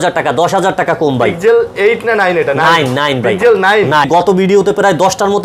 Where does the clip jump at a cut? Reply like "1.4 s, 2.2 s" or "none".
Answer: 4.1 s